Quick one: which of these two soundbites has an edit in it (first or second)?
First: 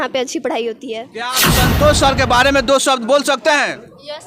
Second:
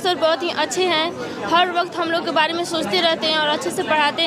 first